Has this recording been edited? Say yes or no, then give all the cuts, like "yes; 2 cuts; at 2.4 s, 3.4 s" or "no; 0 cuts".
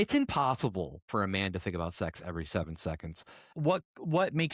yes; 2 cuts; at 1.0 s, 3.5 s